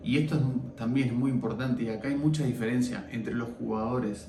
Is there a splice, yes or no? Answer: no